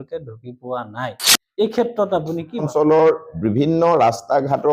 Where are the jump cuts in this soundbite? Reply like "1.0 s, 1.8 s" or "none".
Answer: 2.7 s

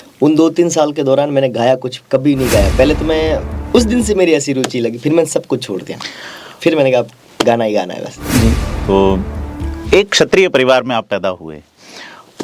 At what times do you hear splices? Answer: 3.5 s, 8.7 s

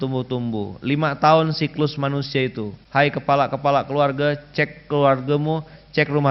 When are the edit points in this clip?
2.8 s

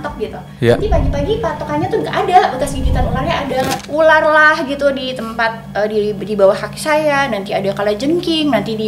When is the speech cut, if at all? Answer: 3.8 s

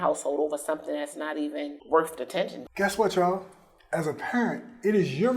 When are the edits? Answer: 1.8 s, 2.6 s

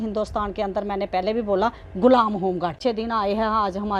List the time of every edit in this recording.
2.8 s

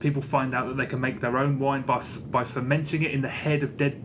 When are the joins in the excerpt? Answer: 1.7 s

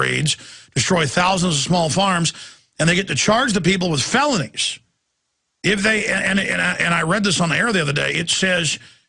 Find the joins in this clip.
none

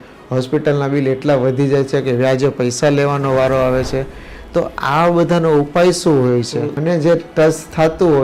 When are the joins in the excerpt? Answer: 6.8 s

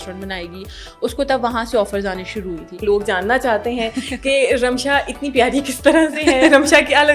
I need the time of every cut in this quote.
2.8 s

